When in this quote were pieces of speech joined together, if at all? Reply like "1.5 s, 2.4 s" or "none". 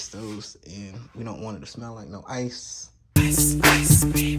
none